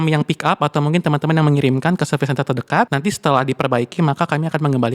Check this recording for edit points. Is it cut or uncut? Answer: cut